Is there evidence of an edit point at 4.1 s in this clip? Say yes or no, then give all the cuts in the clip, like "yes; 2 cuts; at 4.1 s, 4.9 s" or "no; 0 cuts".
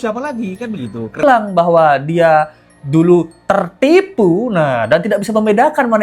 no; 1 cut; at 1.2 s